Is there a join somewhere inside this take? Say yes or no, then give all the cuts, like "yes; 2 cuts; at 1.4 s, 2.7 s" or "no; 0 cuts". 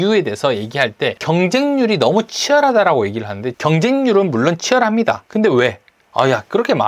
yes; 2 cuts; at 1.2 s, 3.5 s